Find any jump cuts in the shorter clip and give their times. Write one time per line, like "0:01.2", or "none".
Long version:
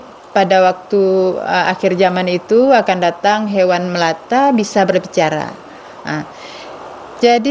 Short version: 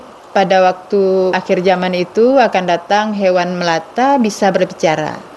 0:01.4